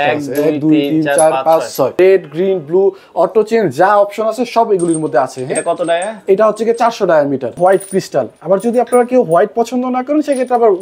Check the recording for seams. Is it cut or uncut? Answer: cut